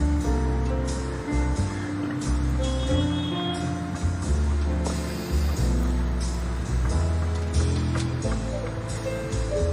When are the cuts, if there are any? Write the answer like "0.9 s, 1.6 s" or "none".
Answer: none